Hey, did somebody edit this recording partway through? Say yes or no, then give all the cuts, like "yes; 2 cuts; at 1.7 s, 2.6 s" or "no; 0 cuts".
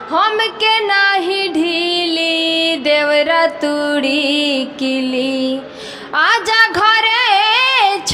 no; 0 cuts